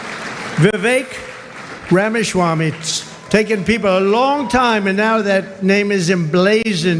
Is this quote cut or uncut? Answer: uncut